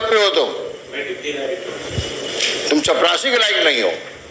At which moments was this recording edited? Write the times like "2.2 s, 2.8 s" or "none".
none